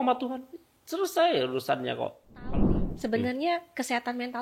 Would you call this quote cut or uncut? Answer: cut